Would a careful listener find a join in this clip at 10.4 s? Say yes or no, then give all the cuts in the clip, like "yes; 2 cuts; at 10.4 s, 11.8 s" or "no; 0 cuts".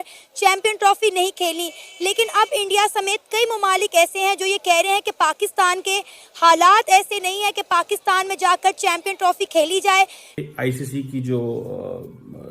yes; 1 cut; at 10.4 s